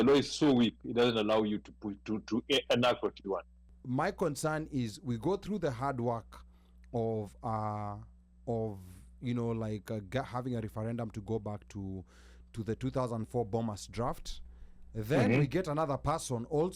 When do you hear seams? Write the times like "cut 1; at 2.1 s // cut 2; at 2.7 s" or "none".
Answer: cut 1; at 3.8 s